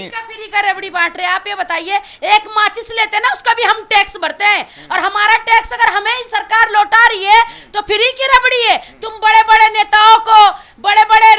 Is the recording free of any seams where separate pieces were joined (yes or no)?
yes